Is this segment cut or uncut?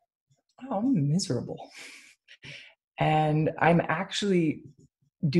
uncut